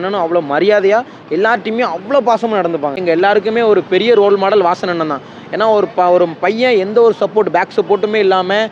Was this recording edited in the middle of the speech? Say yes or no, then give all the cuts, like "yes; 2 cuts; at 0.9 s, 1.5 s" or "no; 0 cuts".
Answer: yes; 1 cut; at 3.0 s